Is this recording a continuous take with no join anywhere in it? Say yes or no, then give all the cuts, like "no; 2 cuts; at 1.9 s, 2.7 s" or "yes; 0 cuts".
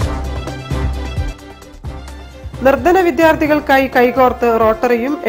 yes; 0 cuts